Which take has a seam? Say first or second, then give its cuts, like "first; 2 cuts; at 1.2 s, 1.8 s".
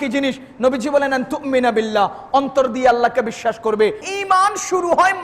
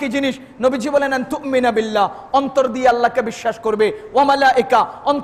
first; 1 cut; at 4.0 s